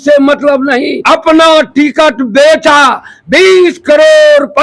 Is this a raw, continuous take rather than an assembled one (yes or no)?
no